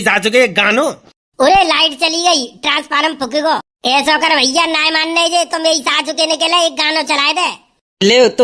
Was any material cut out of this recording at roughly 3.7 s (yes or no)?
yes